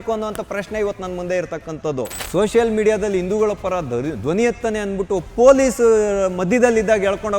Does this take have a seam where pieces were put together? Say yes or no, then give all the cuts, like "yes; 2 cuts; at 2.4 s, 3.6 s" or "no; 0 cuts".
yes; 1 cut; at 2.2 s